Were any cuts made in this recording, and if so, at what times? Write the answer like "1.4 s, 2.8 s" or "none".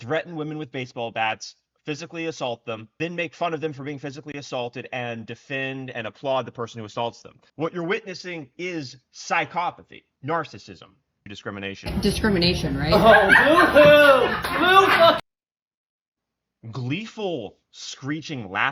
11.3 s